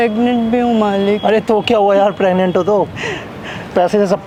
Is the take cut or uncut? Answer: uncut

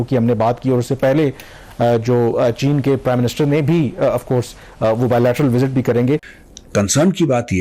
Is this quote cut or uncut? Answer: uncut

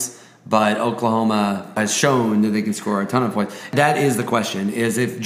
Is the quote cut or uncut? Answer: cut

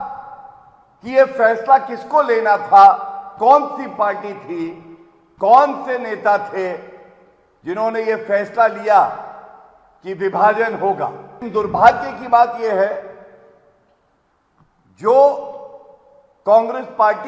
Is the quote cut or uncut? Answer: cut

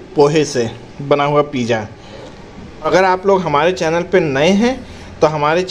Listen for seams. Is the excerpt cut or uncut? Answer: cut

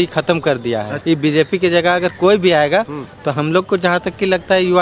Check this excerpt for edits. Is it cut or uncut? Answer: cut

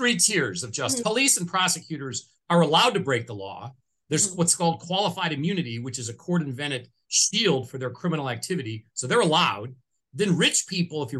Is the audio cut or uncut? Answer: cut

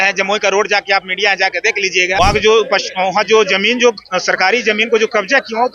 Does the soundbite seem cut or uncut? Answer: cut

